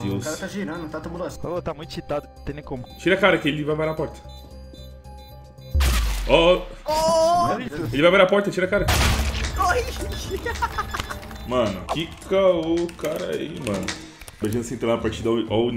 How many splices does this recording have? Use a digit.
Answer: 3